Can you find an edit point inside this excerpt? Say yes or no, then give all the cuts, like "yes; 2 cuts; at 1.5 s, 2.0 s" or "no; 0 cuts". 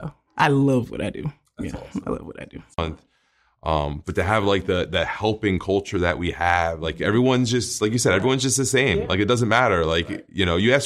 yes; 1 cut; at 2.8 s